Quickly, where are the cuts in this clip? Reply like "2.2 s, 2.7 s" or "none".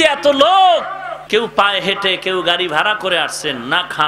1.1 s

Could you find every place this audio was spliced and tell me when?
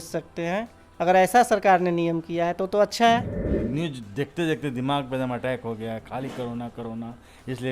3.2 s

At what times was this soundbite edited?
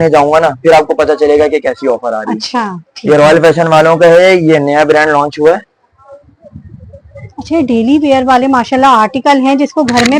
none

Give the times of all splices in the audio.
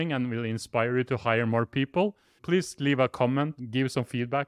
2.4 s, 3.5 s

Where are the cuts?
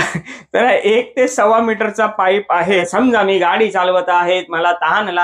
2.6 s

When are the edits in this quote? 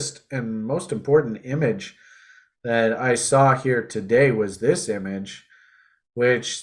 none

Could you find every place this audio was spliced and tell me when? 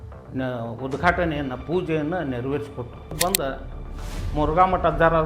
3.1 s

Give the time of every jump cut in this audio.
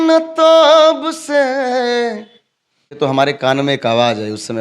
2.9 s

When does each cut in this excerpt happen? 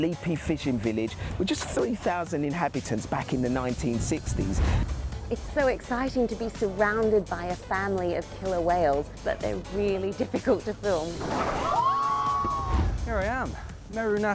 4.9 s, 9.1 s, 11.1 s, 12.7 s

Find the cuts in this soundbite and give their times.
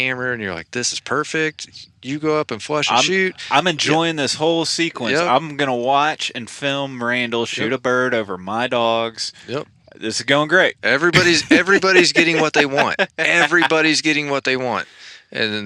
none

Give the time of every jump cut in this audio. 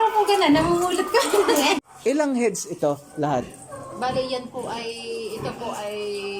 1.8 s

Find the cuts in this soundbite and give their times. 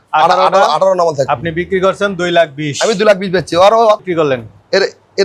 4.0 s

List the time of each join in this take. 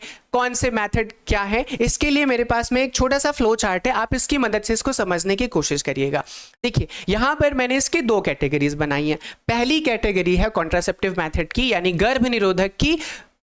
none

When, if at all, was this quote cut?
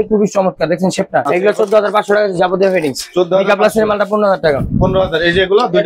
1.3 s

